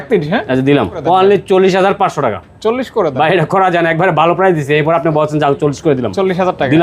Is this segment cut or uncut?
cut